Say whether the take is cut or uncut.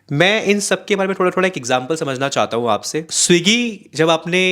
cut